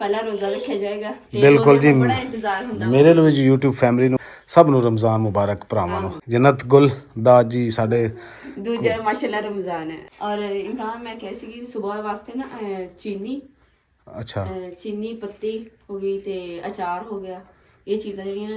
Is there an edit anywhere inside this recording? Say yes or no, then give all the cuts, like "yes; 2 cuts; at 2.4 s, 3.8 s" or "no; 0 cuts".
yes; 3 cuts; at 4.2 s, 6.1 s, 10.0 s